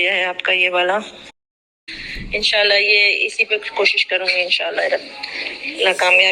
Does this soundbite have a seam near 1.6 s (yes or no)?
yes